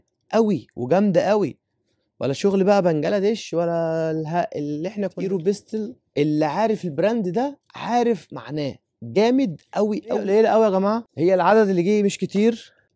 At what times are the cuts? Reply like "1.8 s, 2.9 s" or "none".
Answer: 5.2 s, 10.2 s

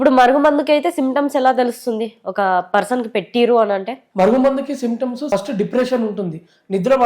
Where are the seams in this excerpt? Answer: 5.3 s

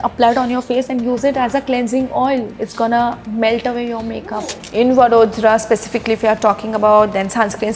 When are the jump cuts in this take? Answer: 2.6 s, 4.2 s

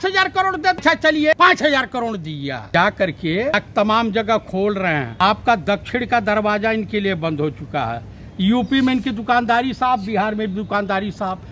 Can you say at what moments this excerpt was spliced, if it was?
0.8 s, 2.7 s, 3.5 s, 5.1 s

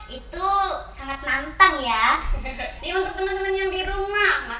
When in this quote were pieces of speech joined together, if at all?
2.8 s

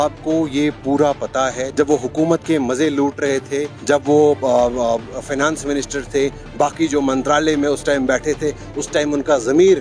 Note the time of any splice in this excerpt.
1.6 s, 3.7 s

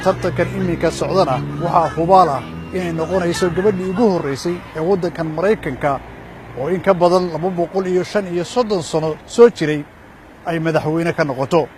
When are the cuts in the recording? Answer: none

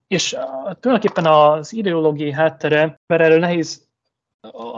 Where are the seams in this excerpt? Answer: 3.0 s

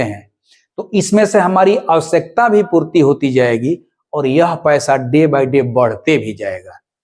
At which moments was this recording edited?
none

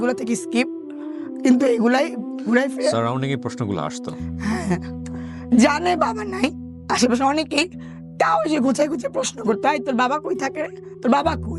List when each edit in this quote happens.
none

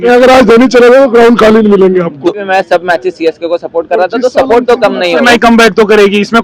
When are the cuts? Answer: 2.4 s, 5.2 s

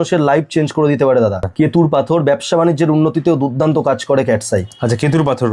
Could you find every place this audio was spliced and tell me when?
1.4 s

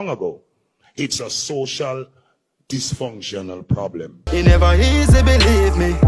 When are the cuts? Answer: 4.2 s

